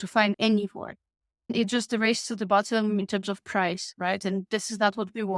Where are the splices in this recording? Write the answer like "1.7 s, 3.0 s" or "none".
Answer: 1.5 s